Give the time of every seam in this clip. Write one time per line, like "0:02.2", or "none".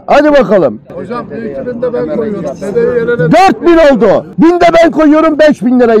none

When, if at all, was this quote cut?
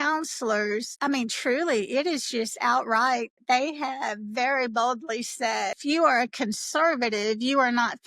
0:05.8

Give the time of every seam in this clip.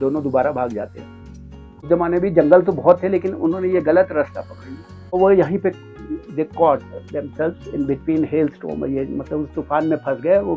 0:01.8
0:05.2

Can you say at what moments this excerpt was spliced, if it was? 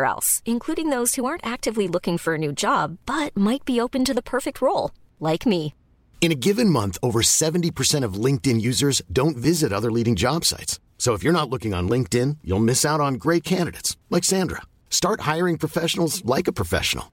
none

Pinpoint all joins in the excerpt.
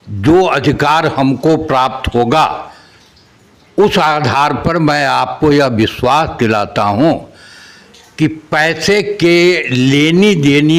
none

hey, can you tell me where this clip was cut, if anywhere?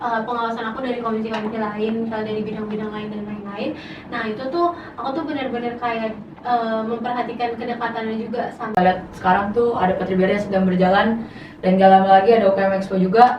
0:08.7

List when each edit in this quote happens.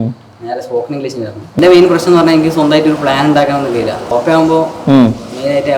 0:01.6
0:04.0

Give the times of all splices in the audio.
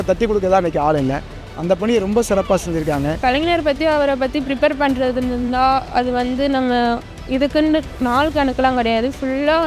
0:03.2

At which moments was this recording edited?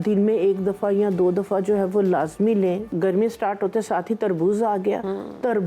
0:02.9

